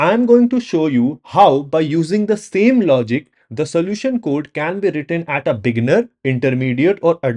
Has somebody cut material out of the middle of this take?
no; 0 cuts

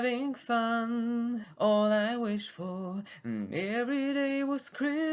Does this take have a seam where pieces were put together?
yes; 1 cut; at 1.5 s

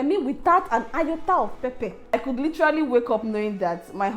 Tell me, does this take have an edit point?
yes; 1 cut; at 2.1 s

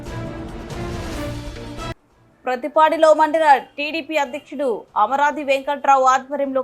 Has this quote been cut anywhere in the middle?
yes; 1 cut; at 2.1 s

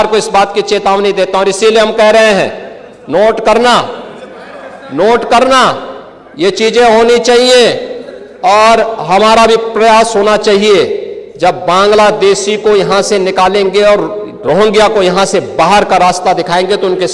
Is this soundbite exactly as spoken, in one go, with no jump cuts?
yes; 0 cuts

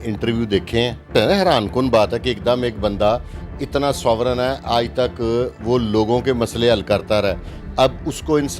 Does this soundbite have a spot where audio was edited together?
yes; 1 cut; at 1.1 s

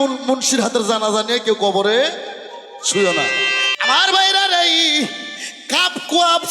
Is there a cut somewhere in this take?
yes; 1 cut; at 3.6 s

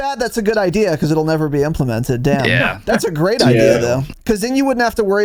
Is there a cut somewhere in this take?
no; 0 cuts

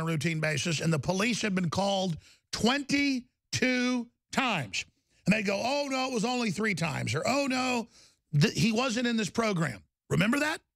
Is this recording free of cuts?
yes; 0 cuts

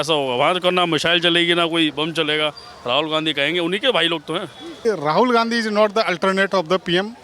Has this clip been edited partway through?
yes; 1 cut; at 4.8 s

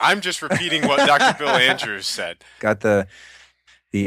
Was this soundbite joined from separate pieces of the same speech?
yes; 1 cut; at 2.6 s

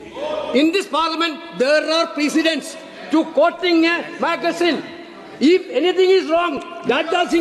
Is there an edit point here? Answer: no; 0 cuts

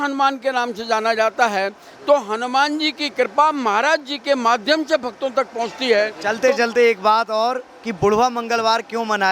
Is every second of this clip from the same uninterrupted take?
no; 1 cut; at 6.2 s

